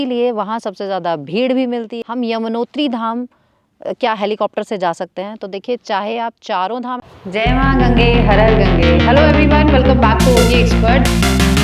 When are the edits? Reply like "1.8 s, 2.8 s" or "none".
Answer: 1.9 s, 6.9 s